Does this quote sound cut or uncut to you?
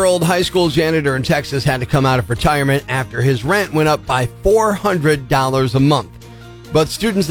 uncut